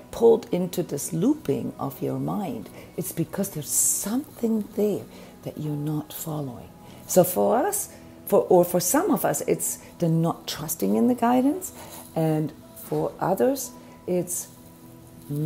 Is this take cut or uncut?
uncut